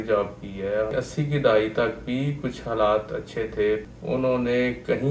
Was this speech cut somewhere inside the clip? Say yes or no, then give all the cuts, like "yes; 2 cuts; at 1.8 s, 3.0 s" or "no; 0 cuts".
yes; 2 cuts; at 0.9 s, 3.9 s